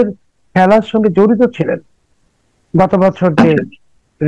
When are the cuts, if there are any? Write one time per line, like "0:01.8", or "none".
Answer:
none